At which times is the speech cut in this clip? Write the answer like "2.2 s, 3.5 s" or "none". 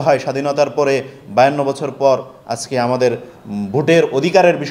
none